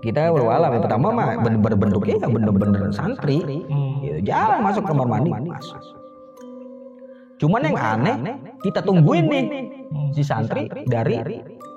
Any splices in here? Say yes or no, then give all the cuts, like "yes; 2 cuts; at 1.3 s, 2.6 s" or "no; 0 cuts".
no; 0 cuts